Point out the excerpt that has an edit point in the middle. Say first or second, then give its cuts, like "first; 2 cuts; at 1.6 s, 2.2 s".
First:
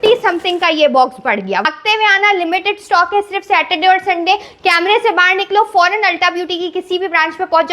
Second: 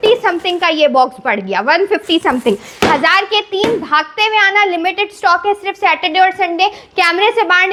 first; 1 cut; at 1.7 s